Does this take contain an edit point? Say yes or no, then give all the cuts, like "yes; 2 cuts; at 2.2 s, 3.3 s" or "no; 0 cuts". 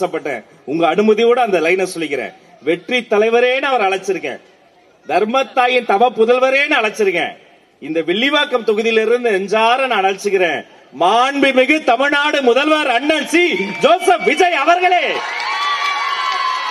no; 0 cuts